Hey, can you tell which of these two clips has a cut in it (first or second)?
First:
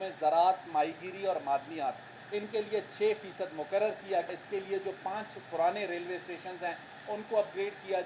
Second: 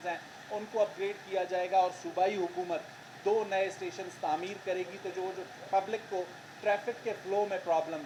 first